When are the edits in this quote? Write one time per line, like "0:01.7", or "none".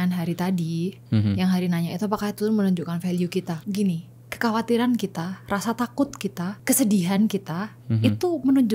0:03.6
0:06.6